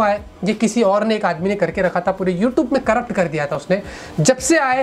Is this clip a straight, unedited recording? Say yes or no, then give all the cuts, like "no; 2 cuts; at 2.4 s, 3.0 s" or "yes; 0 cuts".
yes; 0 cuts